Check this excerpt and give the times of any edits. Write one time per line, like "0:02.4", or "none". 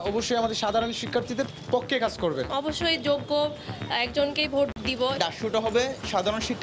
0:02.5
0:05.0